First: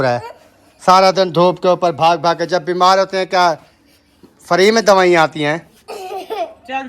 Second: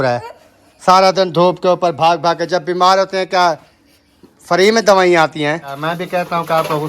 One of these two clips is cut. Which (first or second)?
second